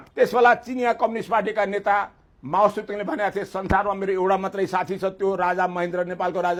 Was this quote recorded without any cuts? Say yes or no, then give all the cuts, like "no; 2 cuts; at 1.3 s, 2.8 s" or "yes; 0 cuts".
yes; 0 cuts